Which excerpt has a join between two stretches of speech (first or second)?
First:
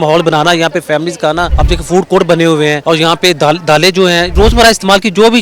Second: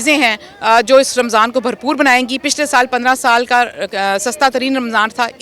first